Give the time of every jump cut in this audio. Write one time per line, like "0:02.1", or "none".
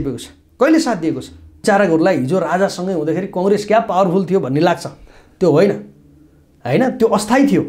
0:01.6